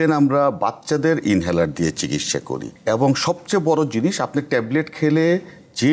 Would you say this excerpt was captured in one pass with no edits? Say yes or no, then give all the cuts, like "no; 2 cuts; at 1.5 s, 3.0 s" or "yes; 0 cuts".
no; 1 cut; at 2.6 s